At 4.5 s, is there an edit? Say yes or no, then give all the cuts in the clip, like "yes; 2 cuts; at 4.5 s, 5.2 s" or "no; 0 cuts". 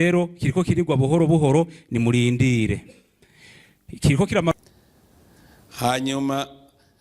yes; 1 cut; at 4.5 s